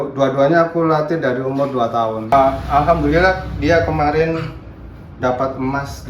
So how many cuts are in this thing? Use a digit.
1